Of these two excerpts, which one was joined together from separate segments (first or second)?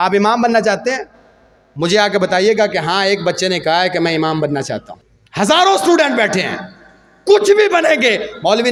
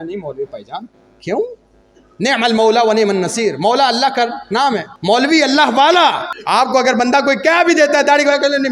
second